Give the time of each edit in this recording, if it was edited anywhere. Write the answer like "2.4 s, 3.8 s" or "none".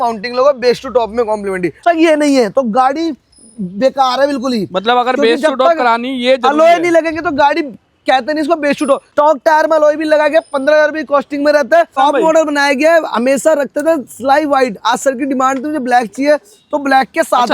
1.8 s, 9.1 s, 12.0 s